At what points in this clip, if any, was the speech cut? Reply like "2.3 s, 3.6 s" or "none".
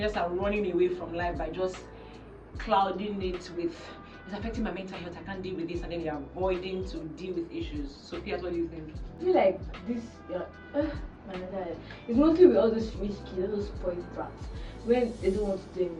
9.2 s

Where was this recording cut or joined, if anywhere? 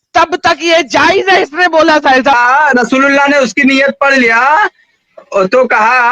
2.4 s

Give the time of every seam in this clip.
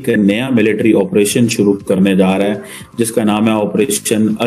none

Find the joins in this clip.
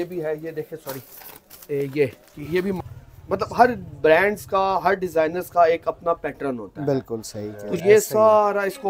2.8 s, 7.6 s

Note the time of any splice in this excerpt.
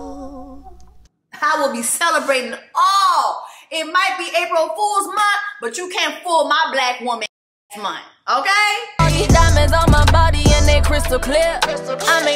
8.9 s

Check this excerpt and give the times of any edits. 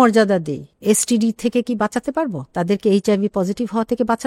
none

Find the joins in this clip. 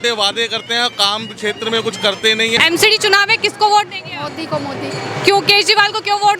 2.6 s

